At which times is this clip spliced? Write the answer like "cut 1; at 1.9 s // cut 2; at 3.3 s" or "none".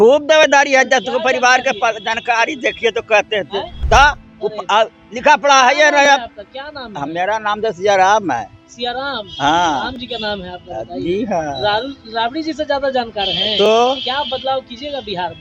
cut 1; at 3.8 s